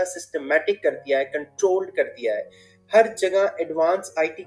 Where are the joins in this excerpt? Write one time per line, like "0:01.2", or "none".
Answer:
none